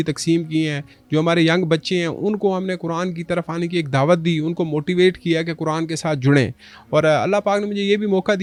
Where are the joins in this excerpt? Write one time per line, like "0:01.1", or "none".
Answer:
none